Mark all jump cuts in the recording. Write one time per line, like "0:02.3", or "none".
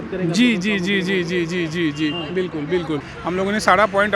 0:03.1